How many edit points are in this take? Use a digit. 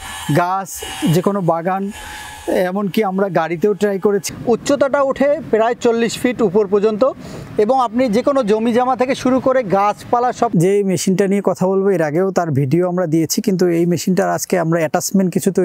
2